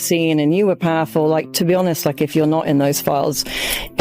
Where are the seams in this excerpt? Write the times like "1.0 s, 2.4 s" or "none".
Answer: none